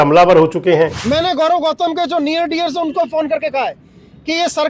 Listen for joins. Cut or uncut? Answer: cut